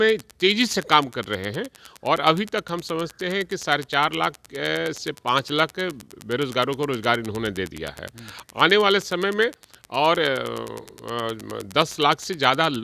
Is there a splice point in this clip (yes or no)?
no